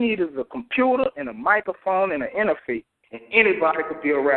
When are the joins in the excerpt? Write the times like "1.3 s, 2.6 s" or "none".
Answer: none